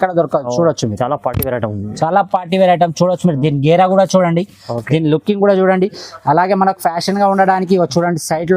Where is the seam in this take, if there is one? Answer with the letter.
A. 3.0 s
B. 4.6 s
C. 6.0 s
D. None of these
D